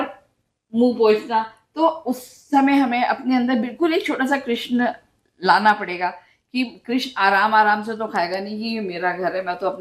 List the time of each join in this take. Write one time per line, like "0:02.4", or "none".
none